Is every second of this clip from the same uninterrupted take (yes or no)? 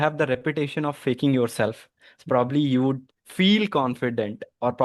yes